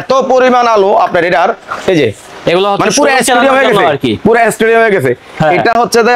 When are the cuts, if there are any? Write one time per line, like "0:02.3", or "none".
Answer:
none